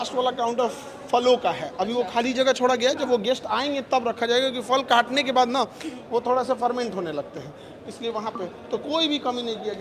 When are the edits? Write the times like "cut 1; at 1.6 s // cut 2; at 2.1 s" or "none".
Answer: none